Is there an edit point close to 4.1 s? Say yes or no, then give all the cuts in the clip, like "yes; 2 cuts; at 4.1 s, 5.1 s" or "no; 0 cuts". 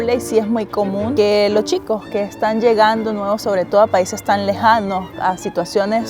no; 1 cut; at 1.1 s